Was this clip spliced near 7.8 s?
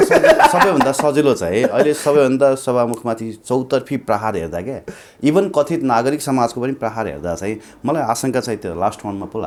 no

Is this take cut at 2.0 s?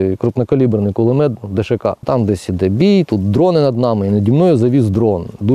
yes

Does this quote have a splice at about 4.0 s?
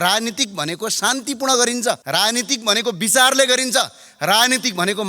no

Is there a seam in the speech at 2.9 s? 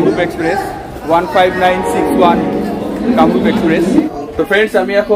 no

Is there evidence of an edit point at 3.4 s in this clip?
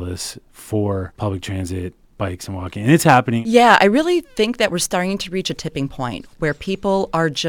yes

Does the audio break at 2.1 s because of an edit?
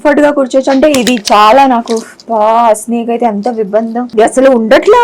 no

